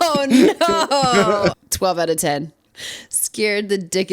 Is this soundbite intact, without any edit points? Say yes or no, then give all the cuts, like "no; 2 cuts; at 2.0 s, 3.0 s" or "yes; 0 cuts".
no; 1 cut; at 1.6 s